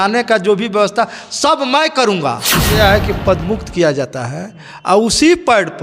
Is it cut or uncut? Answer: cut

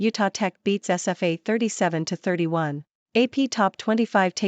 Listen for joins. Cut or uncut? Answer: cut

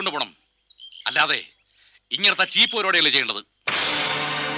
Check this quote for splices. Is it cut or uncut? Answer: uncut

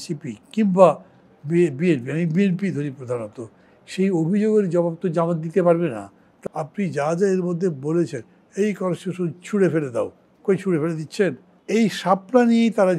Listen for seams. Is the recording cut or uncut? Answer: cut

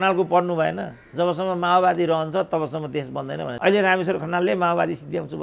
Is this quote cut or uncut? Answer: cut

